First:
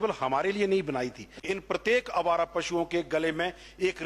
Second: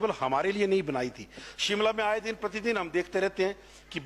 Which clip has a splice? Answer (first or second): first